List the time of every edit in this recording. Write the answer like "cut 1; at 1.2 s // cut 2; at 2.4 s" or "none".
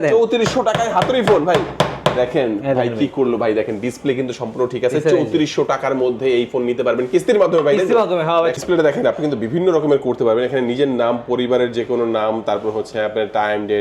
cut 1; at 8.5 s